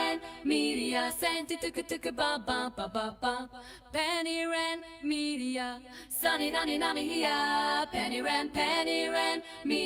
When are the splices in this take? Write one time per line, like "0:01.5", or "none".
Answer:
none